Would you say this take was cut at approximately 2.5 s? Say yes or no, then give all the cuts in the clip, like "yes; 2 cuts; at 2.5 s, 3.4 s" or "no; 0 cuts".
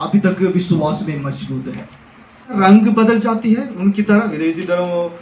yes; 1 cut; at 2.5 s